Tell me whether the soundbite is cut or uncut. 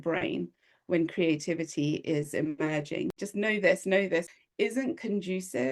cut